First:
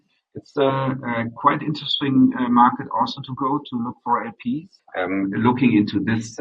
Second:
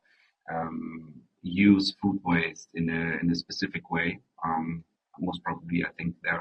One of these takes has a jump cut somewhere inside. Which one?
first; 1 cut; at 4.8 s

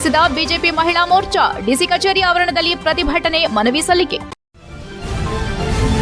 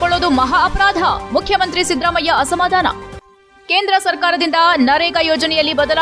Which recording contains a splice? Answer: first; 1 cut; at 4.3 s

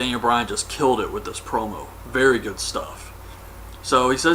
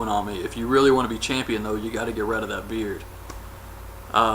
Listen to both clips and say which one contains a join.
second; 1 cut; at 2.3 s

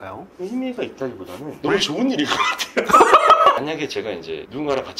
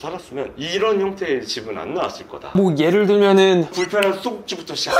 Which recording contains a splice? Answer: first; 1 cut; at 3.6 s

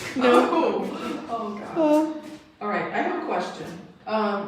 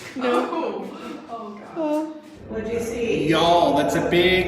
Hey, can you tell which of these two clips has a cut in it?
second; 1 cut; at 2.3 s

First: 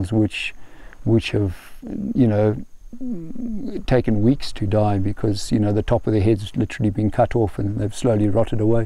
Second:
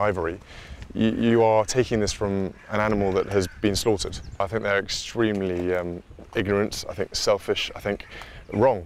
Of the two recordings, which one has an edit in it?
second; 1 cut; at 4.4 s

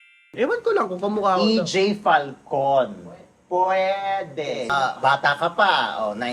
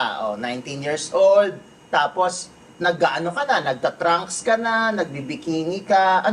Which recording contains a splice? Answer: first; 1 cut; at 4.7 s

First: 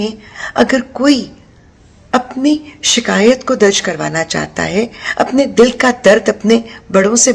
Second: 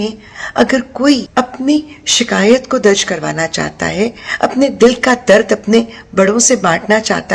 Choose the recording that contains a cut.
second; 1 cut; at 1.3 s

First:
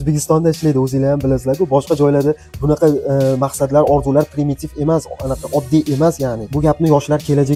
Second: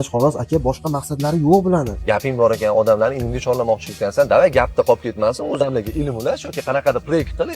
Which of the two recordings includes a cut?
second; 1 cut; at 2.0 s

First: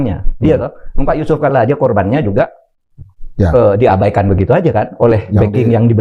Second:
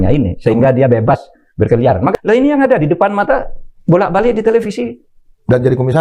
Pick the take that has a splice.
second; 1 cut; at 2.1 s

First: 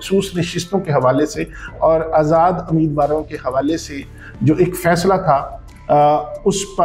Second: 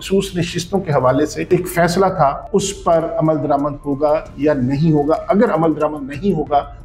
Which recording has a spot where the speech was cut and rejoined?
second; 2 cuts; at 1.5 s, 2.4 s

